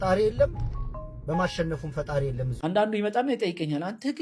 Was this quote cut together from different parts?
yes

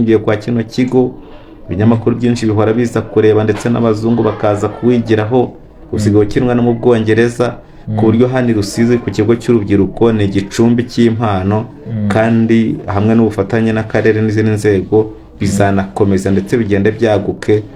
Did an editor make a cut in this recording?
no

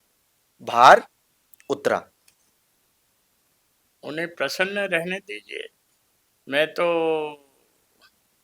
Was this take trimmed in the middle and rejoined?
no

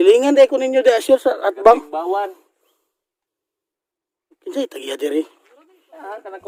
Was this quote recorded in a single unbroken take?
yes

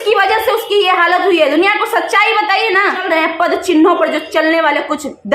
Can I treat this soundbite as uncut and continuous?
no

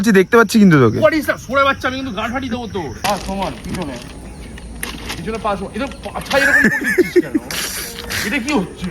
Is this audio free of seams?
no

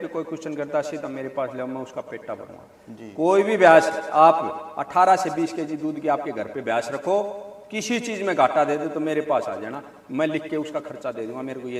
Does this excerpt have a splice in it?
no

